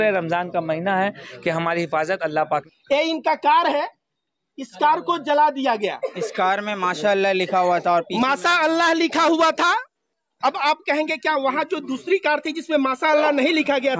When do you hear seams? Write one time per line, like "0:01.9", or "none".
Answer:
0:02.7